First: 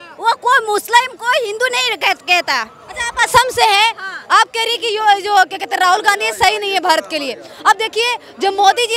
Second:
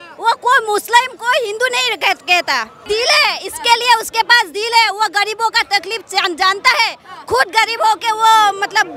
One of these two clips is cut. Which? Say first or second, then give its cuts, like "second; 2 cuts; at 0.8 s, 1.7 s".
second; 1 cut; at 2.8 s